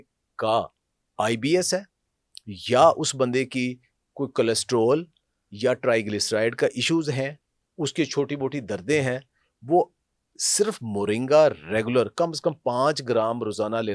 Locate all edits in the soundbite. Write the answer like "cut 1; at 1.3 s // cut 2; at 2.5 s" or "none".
none